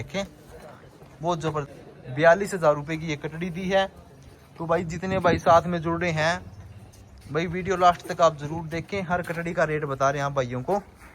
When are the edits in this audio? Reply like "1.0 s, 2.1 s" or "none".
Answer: 1.7 s